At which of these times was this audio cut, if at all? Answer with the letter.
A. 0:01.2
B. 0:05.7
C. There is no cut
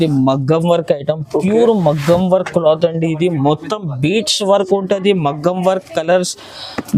C